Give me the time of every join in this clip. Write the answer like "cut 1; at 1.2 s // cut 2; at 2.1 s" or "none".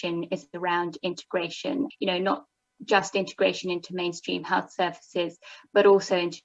cut 1; at 1.9 s